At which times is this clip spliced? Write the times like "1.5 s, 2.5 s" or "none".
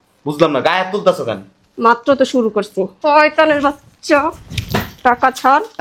2.9 s